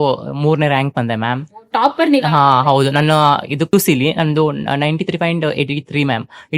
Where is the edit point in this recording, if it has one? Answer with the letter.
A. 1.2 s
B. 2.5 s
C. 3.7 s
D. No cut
C